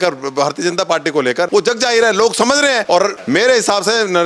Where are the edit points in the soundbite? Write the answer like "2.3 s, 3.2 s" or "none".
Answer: 1.5 s, 2.9 s